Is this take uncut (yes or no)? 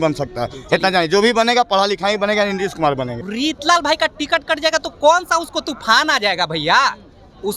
no